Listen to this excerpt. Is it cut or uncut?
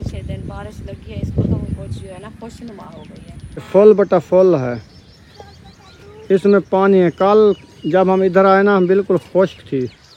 cut